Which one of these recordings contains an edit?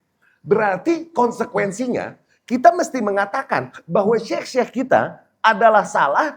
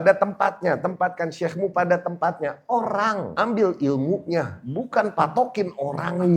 second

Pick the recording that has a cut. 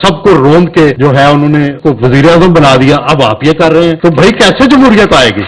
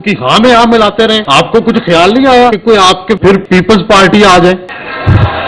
second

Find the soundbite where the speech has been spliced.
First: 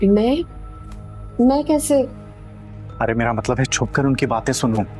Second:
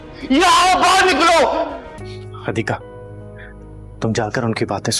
second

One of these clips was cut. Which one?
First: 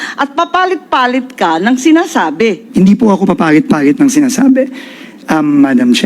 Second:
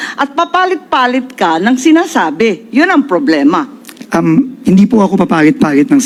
first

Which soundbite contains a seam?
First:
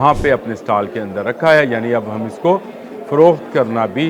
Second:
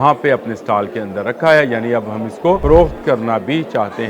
second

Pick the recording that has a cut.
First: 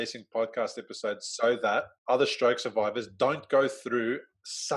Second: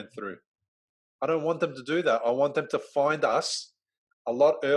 first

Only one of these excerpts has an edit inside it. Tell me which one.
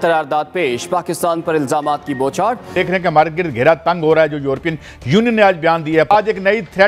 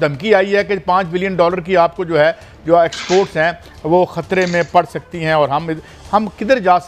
first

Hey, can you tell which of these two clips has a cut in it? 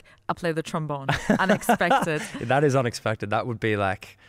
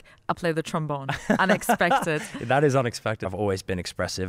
second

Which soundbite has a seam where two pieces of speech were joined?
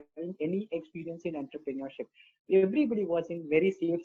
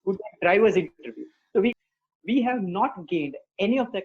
second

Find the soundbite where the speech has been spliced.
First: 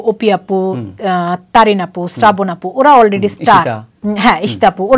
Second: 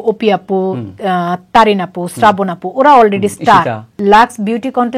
second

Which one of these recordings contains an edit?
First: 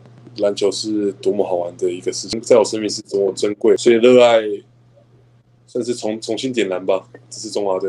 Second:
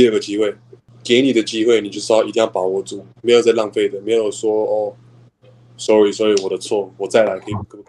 first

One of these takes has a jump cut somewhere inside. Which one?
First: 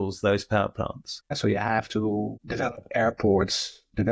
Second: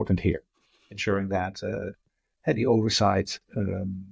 first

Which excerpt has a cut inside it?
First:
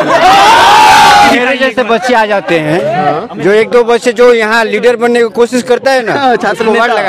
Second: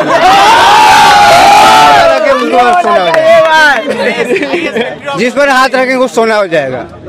first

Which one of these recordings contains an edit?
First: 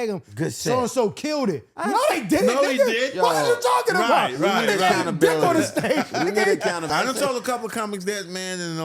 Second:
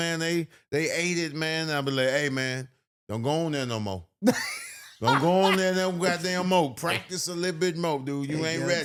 first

